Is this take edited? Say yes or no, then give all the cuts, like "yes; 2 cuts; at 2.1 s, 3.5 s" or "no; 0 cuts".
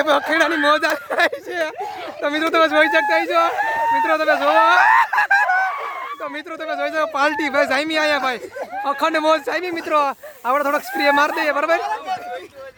no; 0 cuts